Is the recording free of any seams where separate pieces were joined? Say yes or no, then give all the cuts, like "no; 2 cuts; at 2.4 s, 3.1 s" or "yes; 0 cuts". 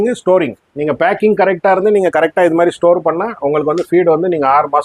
yes; 0 cuts